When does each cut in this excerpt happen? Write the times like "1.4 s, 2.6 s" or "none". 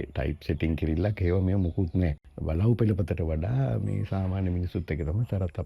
2.3 s